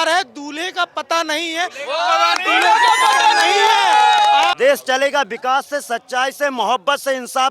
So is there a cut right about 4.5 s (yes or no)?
yes